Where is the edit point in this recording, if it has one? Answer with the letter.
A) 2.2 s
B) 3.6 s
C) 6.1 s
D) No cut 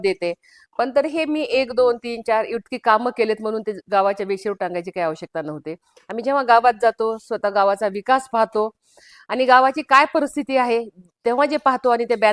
D